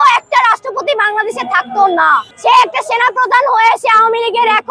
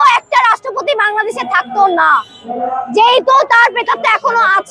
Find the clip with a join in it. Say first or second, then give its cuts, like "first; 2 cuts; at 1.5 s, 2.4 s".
first; 1 cut; at 2.3 s